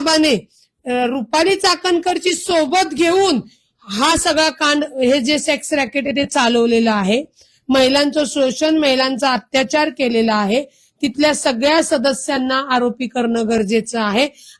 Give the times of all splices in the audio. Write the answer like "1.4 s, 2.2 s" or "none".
none